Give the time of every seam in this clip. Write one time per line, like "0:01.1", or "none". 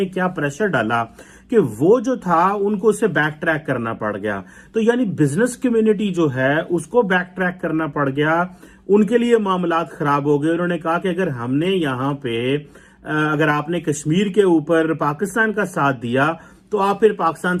none